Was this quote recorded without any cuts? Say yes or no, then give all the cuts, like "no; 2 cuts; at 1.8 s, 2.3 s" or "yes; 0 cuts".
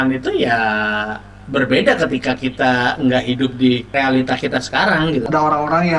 no; 2 cuts; at 3.9 s, 5.3 s